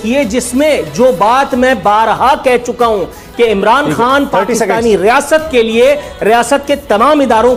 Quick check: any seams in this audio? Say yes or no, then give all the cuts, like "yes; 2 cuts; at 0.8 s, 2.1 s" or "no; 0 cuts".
no; 0 cuts